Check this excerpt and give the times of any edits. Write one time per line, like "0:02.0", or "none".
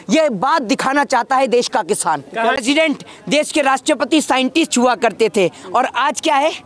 0:02.6